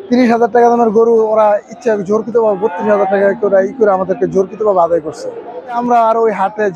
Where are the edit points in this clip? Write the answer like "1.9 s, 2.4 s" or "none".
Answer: 5.8 s

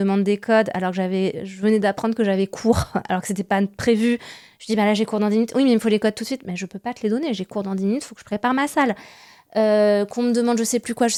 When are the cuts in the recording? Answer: none

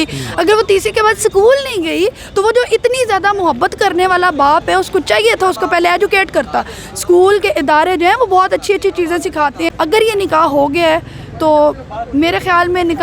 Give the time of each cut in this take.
9.7 s

